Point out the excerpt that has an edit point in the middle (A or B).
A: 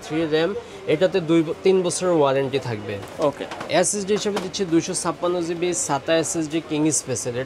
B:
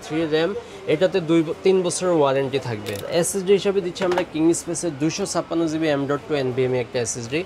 B